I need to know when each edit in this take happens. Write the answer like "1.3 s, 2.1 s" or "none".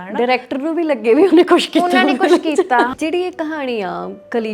2.9 s